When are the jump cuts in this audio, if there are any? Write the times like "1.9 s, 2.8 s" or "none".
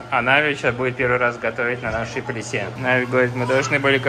2.7 s